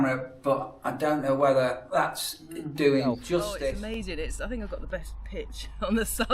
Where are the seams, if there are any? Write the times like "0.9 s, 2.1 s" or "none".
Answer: 3.5 s